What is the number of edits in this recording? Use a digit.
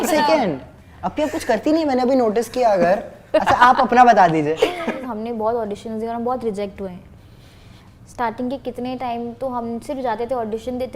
1